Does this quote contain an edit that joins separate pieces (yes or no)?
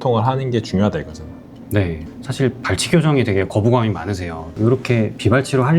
yes